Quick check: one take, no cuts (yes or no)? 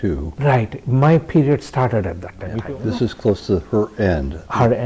no